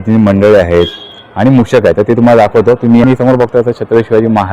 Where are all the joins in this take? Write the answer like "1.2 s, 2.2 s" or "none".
3.0 s